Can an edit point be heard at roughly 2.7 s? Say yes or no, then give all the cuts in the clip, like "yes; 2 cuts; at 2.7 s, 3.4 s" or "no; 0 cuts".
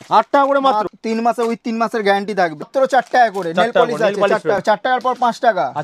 yes; 3 cuts; at 0.9 s, 2.7 s, 4.6 s